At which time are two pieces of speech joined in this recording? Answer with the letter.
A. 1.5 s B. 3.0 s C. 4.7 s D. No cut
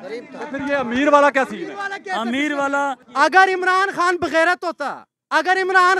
B